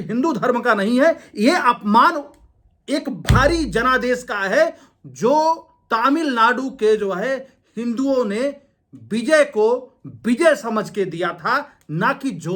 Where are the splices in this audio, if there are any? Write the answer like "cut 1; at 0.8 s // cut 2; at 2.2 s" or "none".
none